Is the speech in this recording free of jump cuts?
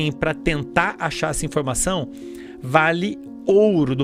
yes; 0 cuts

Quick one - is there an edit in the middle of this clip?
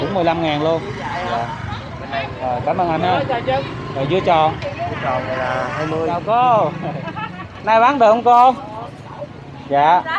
yes; 1 cut; at 6.1 s

